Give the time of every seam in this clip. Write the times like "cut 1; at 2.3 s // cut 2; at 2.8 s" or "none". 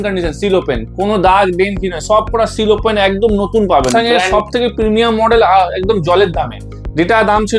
cut 1; at 4.2 s